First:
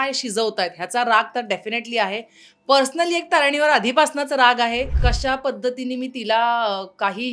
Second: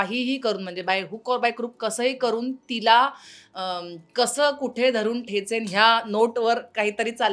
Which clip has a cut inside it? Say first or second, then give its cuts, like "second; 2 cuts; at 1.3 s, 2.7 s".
first; 1 cut; at 4.9 s